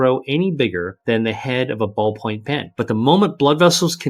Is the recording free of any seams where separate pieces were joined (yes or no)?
no